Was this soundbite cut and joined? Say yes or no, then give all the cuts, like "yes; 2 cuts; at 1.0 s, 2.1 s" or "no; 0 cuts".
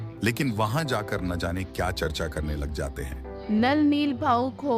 yes; 1 cut; at 3.3 s